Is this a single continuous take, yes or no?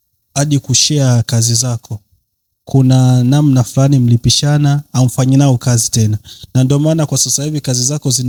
yes